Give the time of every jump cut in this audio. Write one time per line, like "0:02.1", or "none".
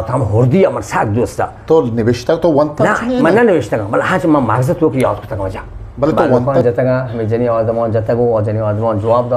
0:06.5